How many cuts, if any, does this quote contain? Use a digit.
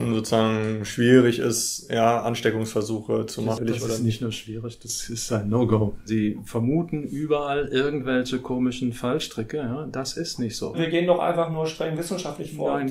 3